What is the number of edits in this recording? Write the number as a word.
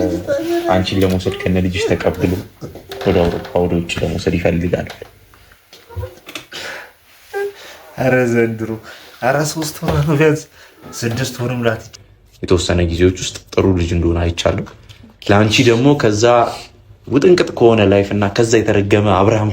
one